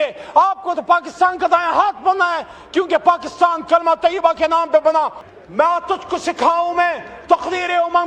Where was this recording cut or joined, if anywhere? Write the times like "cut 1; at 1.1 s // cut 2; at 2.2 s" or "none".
cut 1; at 5.3 s